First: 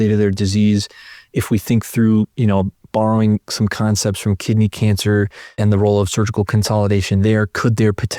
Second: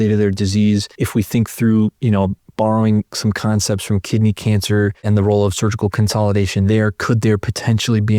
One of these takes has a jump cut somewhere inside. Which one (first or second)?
second